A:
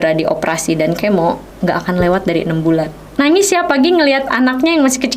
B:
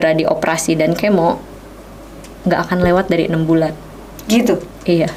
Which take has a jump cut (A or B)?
A